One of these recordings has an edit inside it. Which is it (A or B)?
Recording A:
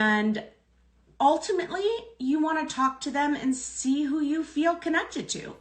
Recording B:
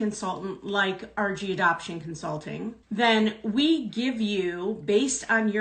B